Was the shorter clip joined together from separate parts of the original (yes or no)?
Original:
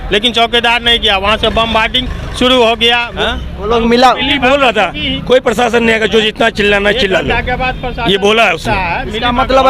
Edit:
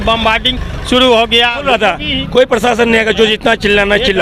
yes